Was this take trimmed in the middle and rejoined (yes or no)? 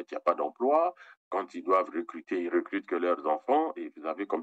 no